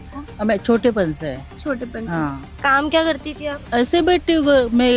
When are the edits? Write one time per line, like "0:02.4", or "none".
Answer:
0:03.6